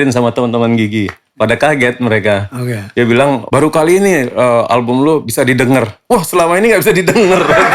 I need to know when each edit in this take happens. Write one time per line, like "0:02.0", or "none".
none